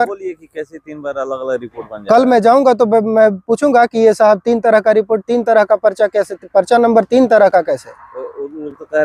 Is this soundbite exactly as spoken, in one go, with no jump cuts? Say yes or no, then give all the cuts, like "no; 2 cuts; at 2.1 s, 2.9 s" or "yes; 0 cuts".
yes; 0 cuts